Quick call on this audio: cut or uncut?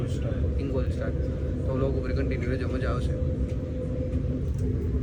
uncut